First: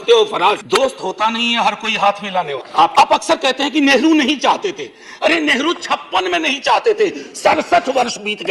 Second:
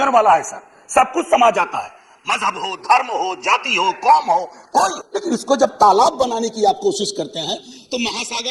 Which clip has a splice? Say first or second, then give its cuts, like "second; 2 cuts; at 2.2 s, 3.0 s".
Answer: first; 1 cut; at 2.9 s